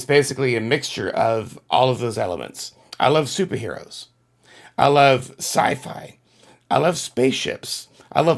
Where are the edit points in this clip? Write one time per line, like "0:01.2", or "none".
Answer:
none